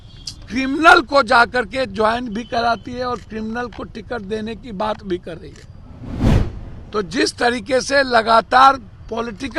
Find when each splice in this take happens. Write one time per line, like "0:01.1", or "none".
none